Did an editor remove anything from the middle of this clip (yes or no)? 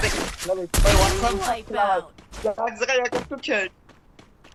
no